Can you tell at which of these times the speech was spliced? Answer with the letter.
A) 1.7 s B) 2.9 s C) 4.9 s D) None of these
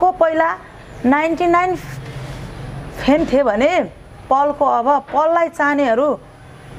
D